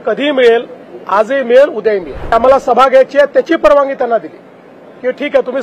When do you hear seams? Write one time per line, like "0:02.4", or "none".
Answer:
0:02.3

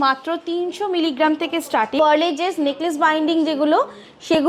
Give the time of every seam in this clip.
0:02.0

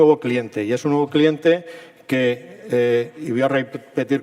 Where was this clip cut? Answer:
0:02.2

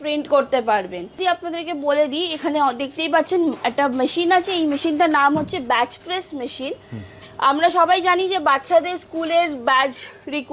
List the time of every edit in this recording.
0:01.2

